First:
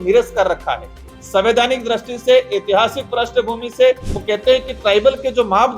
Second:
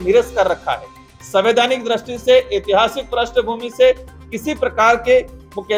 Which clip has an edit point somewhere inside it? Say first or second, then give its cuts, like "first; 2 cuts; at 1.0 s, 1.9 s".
first; 1 cut; at 4.1 s